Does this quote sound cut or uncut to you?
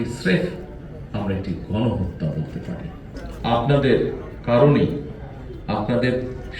cut